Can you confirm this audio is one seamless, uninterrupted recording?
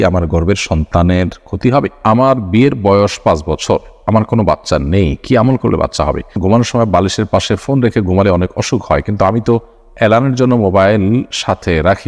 no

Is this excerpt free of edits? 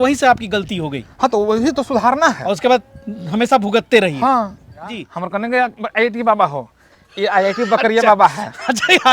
no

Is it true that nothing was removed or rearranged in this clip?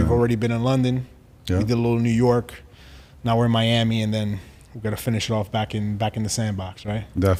yes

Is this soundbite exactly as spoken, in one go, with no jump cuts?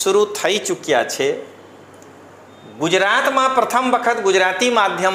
yes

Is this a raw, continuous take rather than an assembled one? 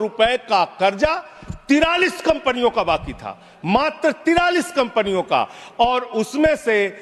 yes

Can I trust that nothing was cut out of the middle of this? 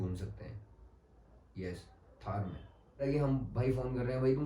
no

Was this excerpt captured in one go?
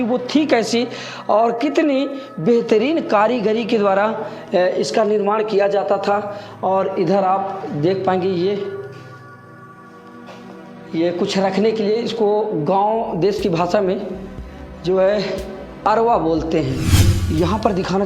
no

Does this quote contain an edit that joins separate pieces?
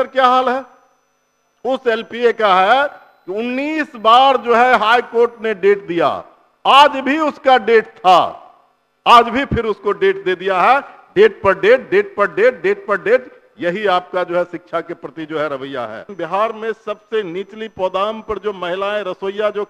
yes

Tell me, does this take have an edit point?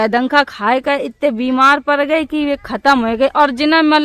no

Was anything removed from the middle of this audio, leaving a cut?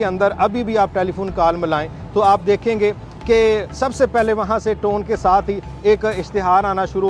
no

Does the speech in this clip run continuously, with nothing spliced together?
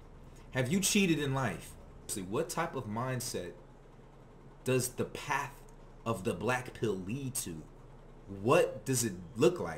no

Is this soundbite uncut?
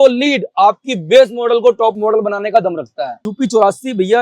no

